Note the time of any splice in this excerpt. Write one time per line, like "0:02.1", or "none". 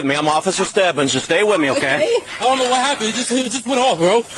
0:02.3